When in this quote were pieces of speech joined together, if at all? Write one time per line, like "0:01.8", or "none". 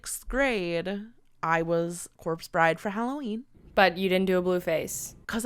none